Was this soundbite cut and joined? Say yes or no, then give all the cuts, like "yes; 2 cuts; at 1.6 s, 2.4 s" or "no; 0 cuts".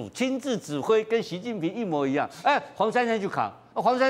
no; 0 cuts